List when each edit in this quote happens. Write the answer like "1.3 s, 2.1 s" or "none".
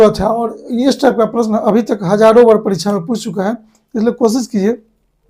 none

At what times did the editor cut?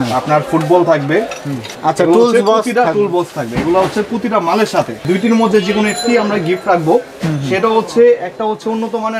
1.6 s, 5.0 s

